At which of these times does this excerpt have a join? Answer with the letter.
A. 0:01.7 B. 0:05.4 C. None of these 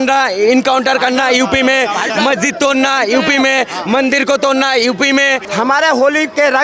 B